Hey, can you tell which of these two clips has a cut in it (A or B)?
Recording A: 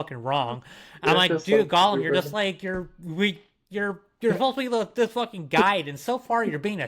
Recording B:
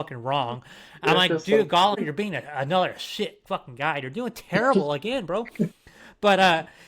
B